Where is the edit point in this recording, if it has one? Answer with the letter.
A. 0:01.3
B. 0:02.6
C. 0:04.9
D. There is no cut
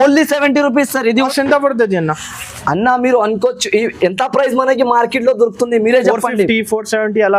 A